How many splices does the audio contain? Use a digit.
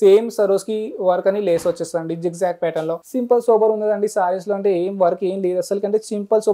1